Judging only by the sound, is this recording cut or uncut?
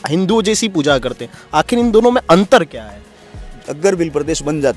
cut